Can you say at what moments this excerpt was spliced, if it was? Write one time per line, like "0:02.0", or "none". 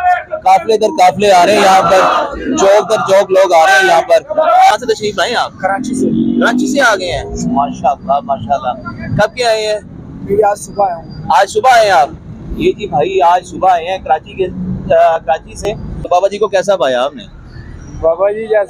0:04.7
0:16.0